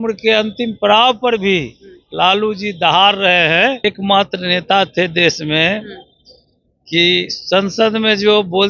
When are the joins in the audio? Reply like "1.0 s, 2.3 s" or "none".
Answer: 3.8 s